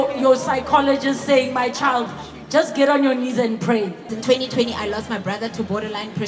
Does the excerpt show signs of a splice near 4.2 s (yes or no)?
yes